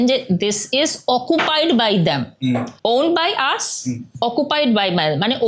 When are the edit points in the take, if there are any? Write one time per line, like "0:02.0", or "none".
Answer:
none